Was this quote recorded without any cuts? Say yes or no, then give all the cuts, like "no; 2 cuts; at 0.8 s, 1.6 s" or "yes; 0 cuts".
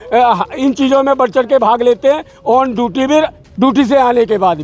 no; 1 cut; at 3.4 s